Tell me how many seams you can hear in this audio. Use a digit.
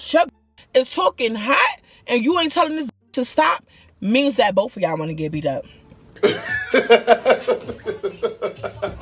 0